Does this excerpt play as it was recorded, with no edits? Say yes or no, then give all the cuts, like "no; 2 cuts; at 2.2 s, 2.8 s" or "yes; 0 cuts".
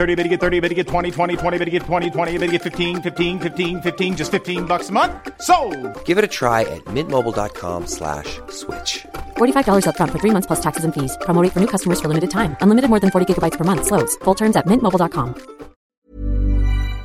no; 1 cut; at 15.9 s